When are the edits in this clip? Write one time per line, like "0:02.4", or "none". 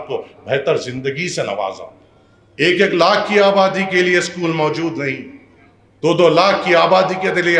none